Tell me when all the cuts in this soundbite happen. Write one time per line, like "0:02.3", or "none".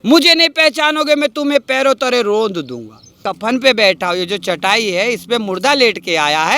0:03.2